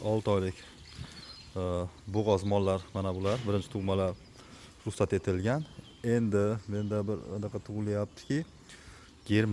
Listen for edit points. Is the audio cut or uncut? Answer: uncut